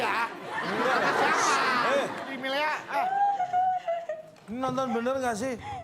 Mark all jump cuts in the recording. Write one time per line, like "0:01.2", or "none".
0:02.4

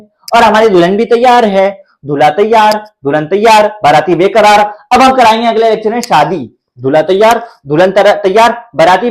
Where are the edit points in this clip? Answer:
none

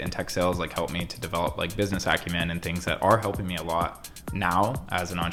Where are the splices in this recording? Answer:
none

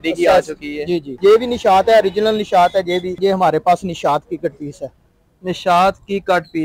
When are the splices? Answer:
0:01.1
0:03.2

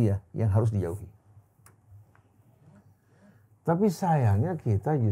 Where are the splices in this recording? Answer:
none

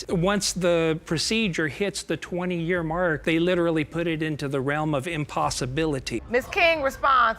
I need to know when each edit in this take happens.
0:06.2

